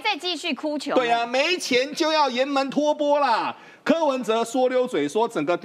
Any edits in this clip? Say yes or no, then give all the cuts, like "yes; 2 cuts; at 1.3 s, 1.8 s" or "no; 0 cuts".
no; 0 cuts